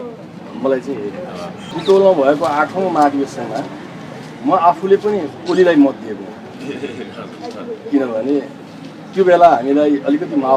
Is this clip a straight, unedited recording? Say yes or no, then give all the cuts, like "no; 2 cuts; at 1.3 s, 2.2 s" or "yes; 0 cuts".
no; 1 cut; at 1.6 s